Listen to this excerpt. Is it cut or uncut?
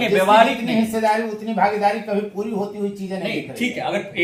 uncut